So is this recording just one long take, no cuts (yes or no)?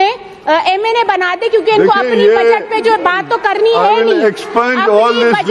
yes